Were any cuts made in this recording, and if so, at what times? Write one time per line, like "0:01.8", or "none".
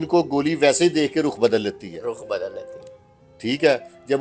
none